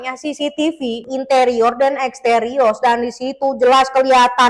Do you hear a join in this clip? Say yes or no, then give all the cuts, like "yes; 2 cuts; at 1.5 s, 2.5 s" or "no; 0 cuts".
yes; 1 cut; at 1.0 s